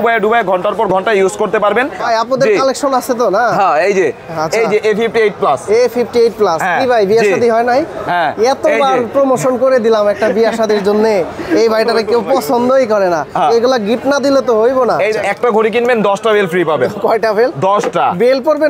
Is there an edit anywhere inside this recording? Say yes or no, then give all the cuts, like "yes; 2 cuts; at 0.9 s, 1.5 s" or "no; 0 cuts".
yes; 2 cuts; at 2.0 s, 15.2 s